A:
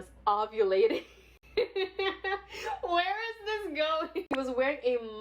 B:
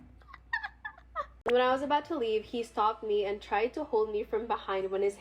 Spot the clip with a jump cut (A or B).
B